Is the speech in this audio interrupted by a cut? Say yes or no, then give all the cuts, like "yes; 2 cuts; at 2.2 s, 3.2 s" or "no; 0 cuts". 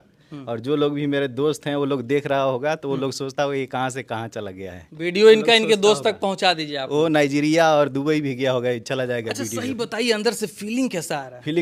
no; 0 cuts